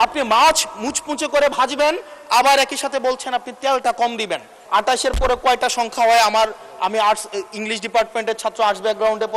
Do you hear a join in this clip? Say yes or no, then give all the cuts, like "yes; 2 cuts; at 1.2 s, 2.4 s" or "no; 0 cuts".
yes; 1 cut; at 4.5 s